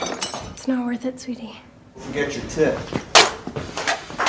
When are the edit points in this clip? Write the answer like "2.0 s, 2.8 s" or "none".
2.0 s